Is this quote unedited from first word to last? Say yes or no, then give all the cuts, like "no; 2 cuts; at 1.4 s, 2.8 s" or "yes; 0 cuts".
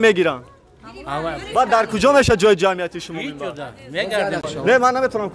no; 1 cut; at 4.4 s